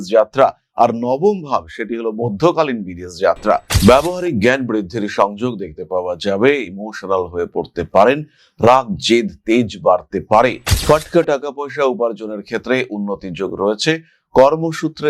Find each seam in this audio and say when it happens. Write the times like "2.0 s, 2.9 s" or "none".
3.7 s, 10.7 s